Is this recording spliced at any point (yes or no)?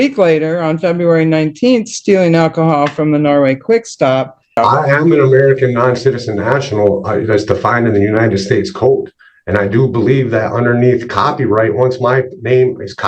yes